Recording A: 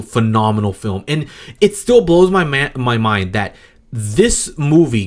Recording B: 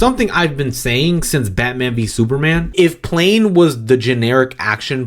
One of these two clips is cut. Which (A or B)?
B